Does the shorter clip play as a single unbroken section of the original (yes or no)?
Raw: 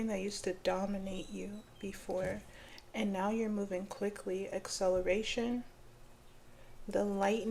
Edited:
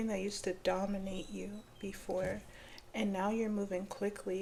yes